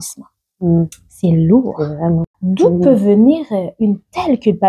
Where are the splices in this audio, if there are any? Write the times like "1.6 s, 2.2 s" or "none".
2.3 s